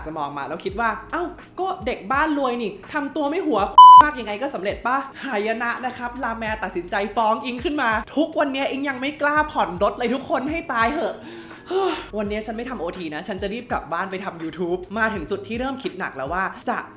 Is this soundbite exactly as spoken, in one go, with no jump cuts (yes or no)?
no